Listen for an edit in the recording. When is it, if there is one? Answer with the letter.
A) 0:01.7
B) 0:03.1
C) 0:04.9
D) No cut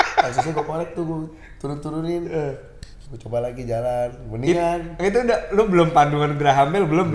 D